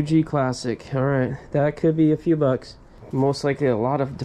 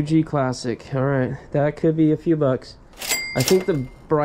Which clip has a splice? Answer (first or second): first